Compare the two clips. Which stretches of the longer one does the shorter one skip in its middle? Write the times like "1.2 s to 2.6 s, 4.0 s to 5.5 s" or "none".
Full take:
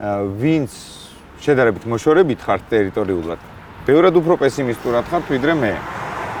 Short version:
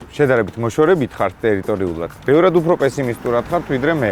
3.4 s to 3.7 s